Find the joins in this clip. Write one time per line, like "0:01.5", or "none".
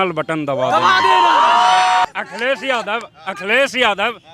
0:02.0